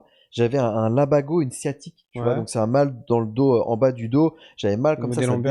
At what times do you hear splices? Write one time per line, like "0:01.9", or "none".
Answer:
none